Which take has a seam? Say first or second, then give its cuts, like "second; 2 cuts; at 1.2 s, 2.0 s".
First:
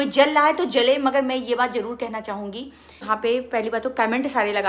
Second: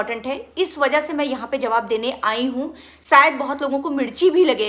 first; 1 cut; at 3.0 s